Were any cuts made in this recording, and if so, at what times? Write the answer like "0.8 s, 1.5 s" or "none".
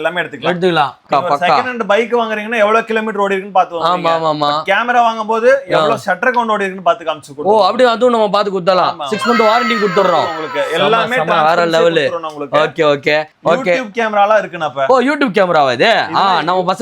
1.0 s, 13.3 s